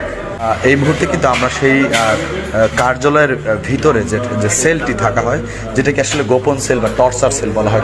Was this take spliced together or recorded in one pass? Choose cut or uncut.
uncut